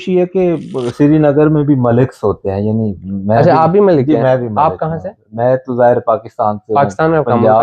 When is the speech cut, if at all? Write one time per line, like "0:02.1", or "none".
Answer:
none